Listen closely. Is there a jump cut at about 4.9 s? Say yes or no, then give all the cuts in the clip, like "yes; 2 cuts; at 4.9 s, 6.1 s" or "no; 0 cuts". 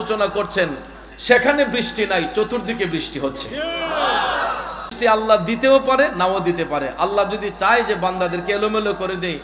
yes; 1 cut; at 4.9 s